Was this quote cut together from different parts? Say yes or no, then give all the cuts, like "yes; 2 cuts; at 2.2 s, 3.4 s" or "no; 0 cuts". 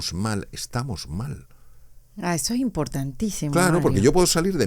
no; 0 cuts